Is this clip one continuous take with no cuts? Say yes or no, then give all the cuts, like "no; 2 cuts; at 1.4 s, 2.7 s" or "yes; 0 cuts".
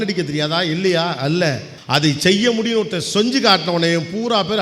no; 1 cut; at 1.7 s